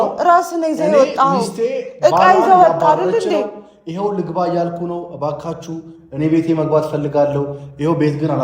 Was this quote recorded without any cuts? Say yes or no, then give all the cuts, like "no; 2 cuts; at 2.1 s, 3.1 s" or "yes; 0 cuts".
yes; 0 cuts